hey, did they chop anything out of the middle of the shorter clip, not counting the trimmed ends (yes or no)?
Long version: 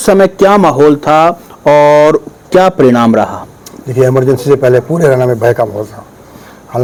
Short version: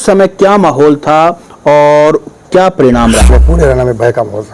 yes